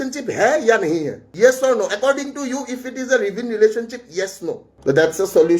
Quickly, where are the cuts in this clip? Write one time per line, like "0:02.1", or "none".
none